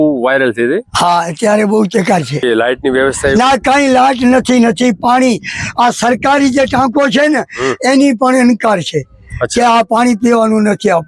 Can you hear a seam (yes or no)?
yes